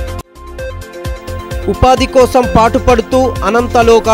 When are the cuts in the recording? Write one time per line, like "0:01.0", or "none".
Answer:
0:01.1

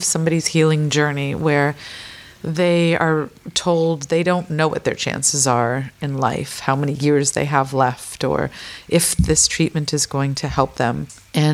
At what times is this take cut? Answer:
none

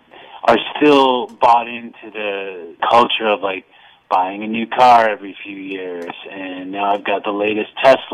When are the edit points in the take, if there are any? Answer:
0:02.7

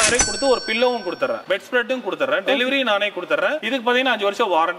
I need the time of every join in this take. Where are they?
none

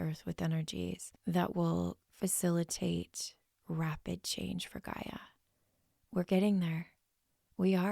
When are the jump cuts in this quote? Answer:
0:01.1
0:02.0

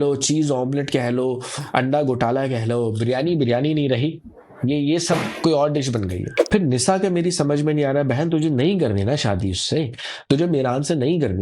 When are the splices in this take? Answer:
0:06.2

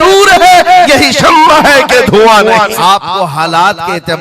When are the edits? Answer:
0:02.7

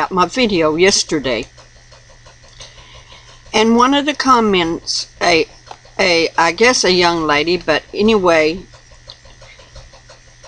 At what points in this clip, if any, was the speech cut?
none

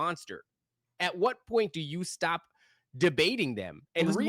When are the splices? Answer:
none

